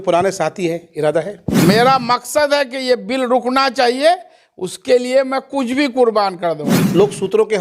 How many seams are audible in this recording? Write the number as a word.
two